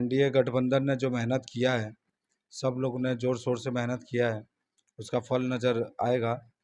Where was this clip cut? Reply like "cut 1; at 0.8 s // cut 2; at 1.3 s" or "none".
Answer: none